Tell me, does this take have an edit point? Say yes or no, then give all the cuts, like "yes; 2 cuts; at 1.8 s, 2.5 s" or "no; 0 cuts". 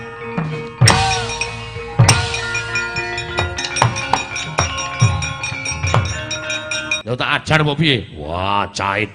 yes; 2 cuts; at 3.6 s, 6.9 s